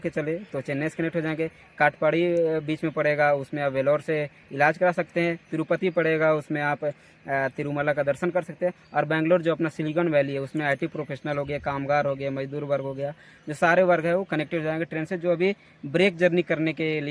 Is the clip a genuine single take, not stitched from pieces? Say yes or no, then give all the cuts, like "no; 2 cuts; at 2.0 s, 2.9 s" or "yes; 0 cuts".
yes; 0 cuts